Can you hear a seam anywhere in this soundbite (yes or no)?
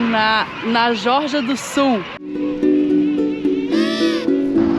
yes